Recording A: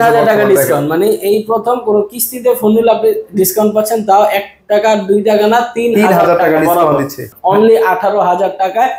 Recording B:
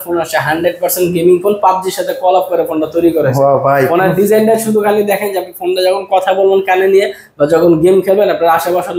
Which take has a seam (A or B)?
A